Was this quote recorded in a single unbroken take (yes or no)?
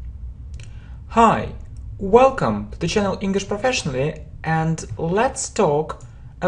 yes